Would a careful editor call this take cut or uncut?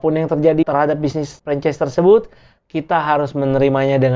uncut